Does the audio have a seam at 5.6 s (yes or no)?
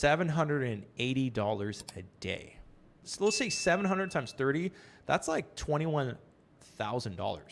no